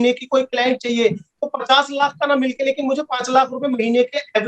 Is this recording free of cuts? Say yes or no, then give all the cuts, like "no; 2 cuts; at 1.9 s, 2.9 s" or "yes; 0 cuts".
yes; 0 cuts